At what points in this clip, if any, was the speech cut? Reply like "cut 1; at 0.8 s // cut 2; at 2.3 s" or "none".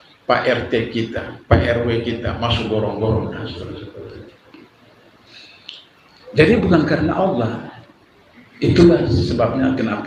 none